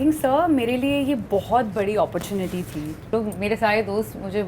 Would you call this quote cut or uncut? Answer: cut